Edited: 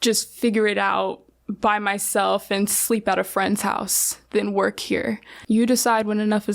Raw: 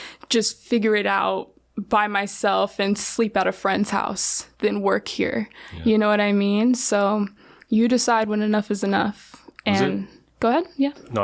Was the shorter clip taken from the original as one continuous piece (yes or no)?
no